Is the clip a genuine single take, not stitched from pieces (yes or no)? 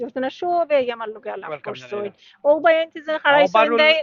yes